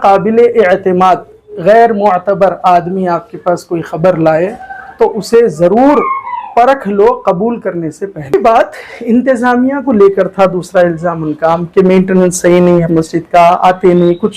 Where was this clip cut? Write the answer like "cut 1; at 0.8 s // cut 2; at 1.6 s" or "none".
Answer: cut 1; at 8.3 s

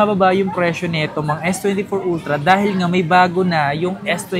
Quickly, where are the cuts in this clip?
none

